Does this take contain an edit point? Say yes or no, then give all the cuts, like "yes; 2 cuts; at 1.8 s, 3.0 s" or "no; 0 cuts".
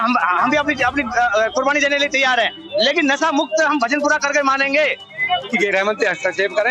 yes; 1 cut; at 5.4 s